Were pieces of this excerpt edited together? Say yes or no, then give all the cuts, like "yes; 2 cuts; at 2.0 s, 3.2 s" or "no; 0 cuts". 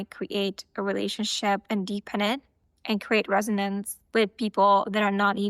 no; 0 cuts